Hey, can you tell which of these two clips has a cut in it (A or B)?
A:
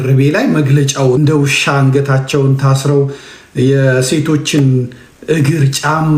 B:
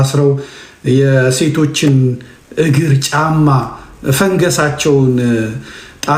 A